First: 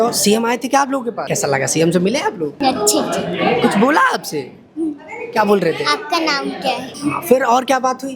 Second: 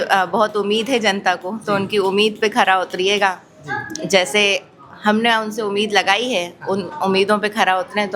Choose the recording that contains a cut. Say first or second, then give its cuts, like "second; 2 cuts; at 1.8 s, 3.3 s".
first; 3 cuts; at 1.2 s, 2.6 s, 6.9 s